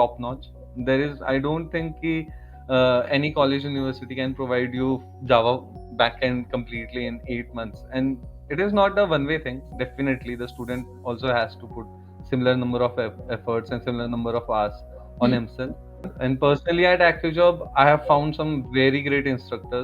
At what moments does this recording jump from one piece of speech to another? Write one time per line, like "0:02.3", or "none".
0:05.8
0:16.1